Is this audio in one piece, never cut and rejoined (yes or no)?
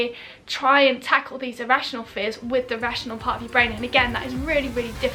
yes